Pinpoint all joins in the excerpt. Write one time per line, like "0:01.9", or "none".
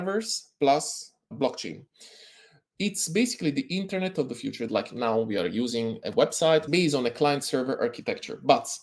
0:04.7
0:06.7